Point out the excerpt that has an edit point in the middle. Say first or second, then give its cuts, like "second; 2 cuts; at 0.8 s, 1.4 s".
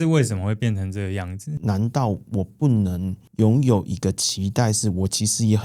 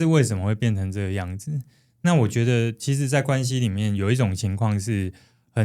first; 1 cut; at 1.5 s